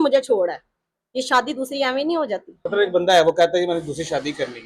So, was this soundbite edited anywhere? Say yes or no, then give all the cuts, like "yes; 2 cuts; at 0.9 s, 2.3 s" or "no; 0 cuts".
yes; 1 cut; at 2.5 s